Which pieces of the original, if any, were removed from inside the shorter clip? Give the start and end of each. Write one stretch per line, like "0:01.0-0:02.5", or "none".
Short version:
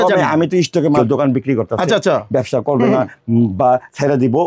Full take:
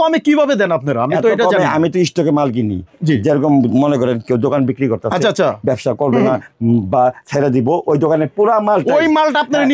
0:02.4-0:04.3